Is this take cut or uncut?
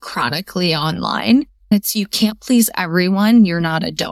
cut